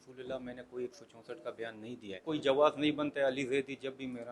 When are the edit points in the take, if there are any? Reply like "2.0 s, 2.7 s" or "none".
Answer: 2.2 s

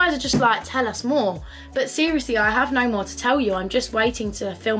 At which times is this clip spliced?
none

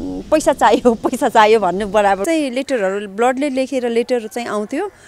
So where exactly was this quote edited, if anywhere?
2.2 s

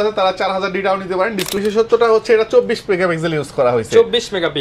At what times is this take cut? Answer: 1.6 s

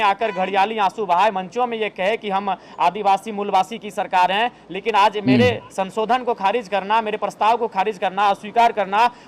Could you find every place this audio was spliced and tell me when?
4.1 s

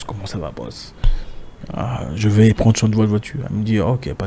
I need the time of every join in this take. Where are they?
none

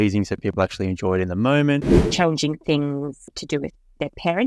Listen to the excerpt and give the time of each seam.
2.0 s, 3.2 s

